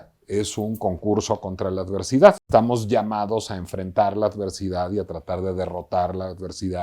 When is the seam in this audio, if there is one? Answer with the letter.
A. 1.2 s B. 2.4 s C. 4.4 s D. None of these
B